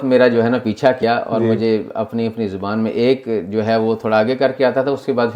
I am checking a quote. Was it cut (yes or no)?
yes